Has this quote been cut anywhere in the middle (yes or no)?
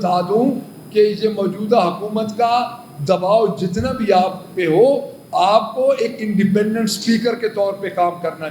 no